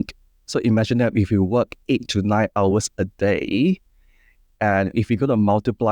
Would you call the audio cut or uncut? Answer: uncut